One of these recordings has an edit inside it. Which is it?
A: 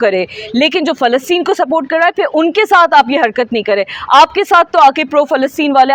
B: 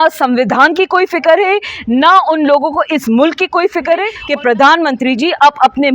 B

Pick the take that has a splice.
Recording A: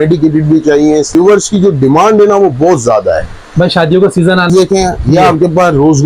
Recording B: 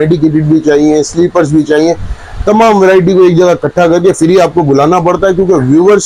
A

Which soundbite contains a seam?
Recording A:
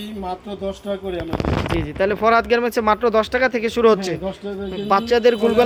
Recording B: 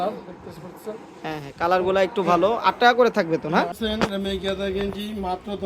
B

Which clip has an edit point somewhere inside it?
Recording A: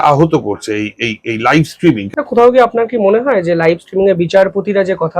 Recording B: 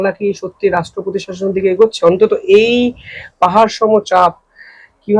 A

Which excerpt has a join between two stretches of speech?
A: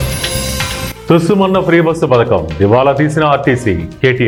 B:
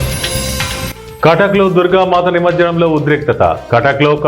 B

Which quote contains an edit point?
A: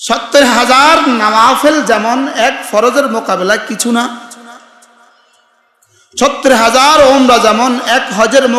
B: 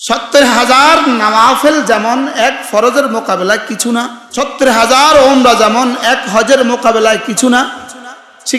B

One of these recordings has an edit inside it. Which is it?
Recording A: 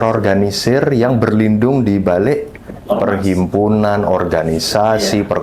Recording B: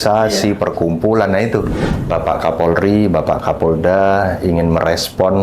B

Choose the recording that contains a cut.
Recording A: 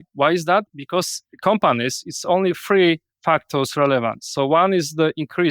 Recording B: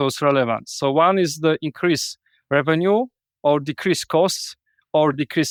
A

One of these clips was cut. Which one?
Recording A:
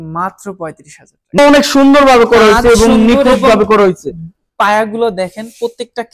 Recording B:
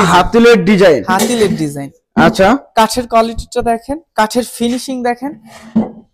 A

